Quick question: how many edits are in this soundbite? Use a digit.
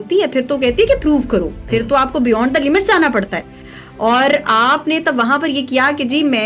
0